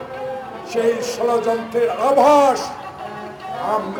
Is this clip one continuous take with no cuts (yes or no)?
yes